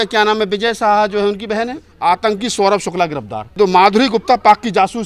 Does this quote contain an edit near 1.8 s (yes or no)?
yes